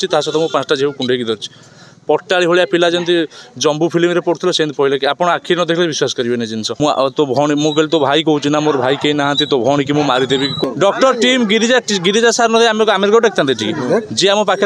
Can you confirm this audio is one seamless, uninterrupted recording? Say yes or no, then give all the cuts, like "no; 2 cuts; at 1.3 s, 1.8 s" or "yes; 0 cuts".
no; 2 cuts; at 6.7 s, 10.6 s